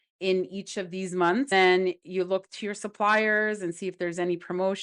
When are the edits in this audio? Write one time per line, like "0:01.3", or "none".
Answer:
0:01.5